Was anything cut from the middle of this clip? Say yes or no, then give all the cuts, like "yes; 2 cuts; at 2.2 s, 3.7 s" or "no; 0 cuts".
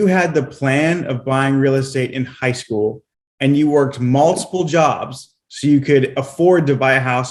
no; 0 cuts